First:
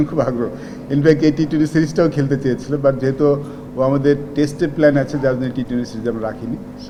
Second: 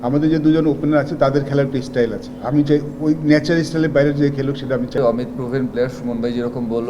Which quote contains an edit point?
second; 1 cut; at 5.0 s

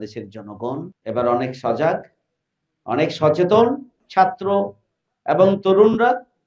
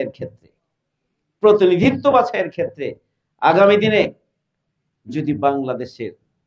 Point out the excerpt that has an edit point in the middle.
first; 2 cuts; at 0.9 s, 4.0 s

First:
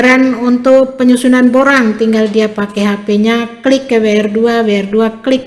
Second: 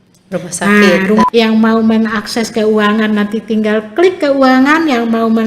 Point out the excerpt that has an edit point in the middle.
second; 1 cut; at 1.2 s

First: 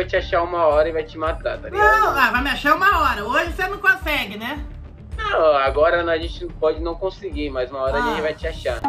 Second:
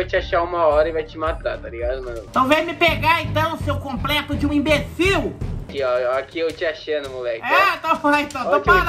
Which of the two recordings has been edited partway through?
second; 2 cuts; at 1.7 s, 5.6 s

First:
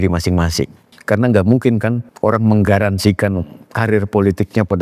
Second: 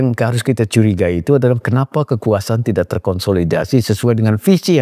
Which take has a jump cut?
first; 2 cuts; at 0.9 s, 2.1 s

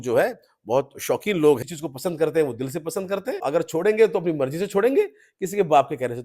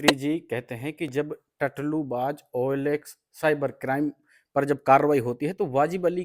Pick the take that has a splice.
first; 2 cuts; at 1.6 s, 3.4 s

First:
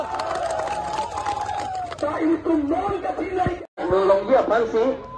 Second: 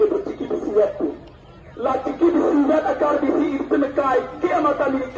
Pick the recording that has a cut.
first; 1 cut; at 3.7 s

